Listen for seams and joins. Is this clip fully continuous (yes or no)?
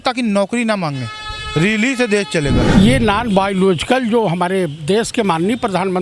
no